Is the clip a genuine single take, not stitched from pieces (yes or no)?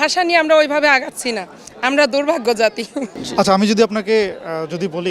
no